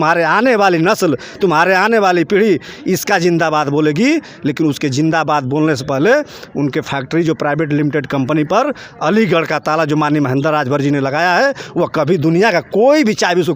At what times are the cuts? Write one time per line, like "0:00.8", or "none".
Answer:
none